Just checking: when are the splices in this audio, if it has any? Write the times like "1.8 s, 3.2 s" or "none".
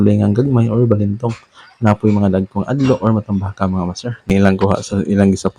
4.3 s